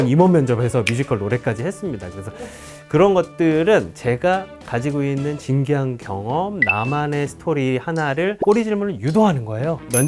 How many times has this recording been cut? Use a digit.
0